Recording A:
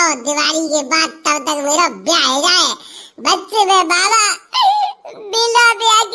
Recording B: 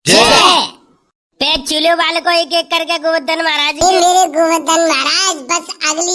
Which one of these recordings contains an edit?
B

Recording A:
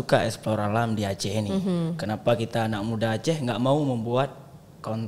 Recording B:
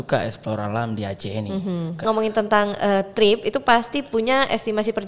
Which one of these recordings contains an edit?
B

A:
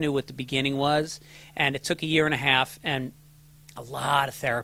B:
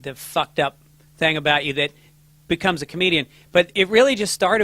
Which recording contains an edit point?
B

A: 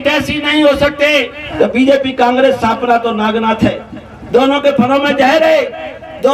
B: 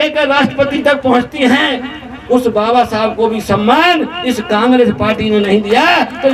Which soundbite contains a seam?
A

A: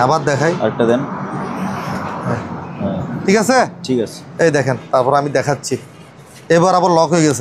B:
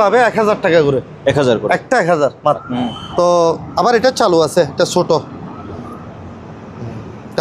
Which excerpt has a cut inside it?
B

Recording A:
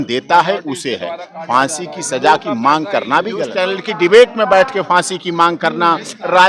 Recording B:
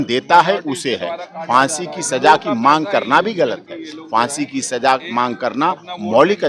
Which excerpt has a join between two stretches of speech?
A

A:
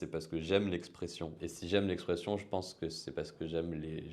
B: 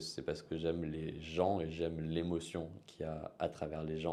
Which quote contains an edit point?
A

